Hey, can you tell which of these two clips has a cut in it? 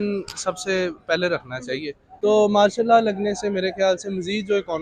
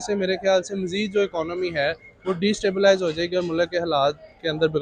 first; 1 cut; at 2.1 s

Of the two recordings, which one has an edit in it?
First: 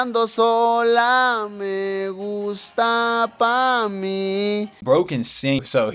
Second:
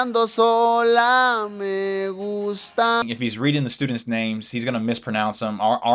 second; 1 cut; at 3.0 s

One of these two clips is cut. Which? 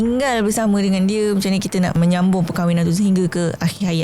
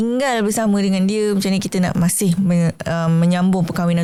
first; 1 cut; at 1.9 s

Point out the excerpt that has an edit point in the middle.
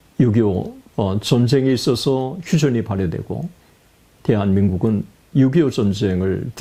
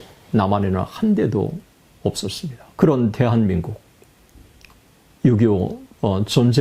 second; 1 cut; at 2.6 s

